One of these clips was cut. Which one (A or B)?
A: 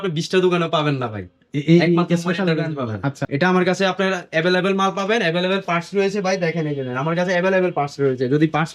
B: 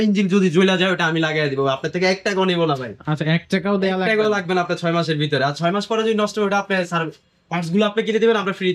A